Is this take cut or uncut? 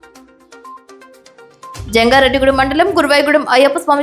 cut